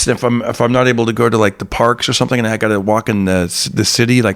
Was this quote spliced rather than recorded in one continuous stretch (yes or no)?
no